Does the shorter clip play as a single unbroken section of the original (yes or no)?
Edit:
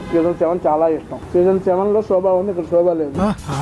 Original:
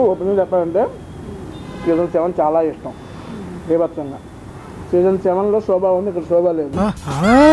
no